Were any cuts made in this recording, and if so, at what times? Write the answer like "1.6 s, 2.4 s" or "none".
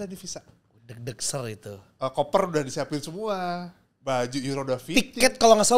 none